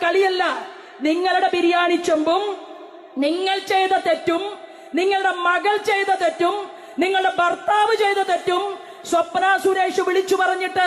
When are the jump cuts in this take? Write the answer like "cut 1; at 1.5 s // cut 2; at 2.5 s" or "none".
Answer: none